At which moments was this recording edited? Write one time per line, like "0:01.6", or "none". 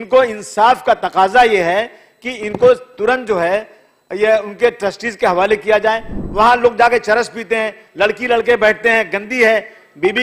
0:06.2